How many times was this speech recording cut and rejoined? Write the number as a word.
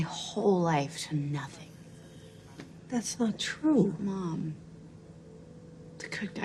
zero